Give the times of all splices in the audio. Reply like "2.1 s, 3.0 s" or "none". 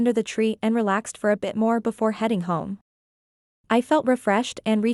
none